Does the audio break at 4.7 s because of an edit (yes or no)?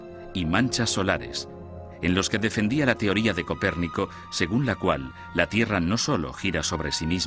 yes